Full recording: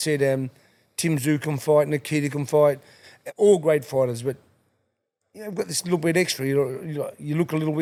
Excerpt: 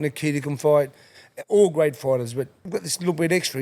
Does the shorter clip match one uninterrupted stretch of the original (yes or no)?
no